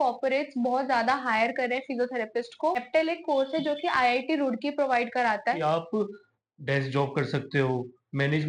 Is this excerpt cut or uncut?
cut